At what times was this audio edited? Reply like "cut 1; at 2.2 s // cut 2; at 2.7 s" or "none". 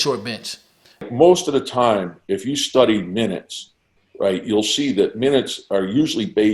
cut 1; at 1.0 s